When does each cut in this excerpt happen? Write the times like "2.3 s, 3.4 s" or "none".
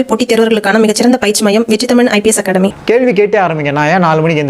2.8 s